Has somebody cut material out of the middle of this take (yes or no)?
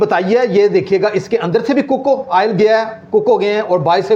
no